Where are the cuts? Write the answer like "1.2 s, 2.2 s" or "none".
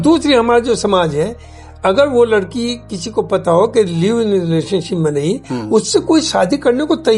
none